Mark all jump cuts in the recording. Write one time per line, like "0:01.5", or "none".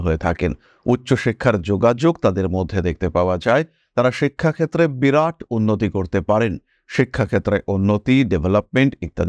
none